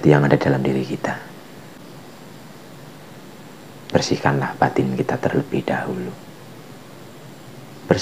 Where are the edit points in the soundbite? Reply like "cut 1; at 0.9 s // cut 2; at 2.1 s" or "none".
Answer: cut 1; at 1.8 s